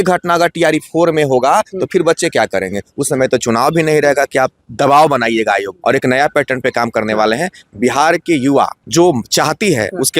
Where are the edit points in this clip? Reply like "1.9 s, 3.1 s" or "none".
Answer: 5.7 s, 8.8 s